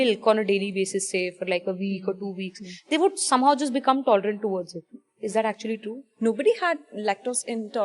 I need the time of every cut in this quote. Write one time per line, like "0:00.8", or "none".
0:05.1
0:06.1